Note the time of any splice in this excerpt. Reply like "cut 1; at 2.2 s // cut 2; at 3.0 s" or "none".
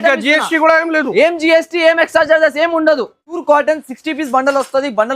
cut 1; at 3.4 s